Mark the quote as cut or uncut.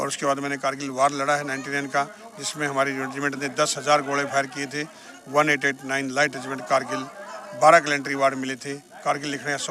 uncut